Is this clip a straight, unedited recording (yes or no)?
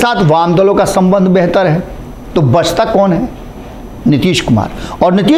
yes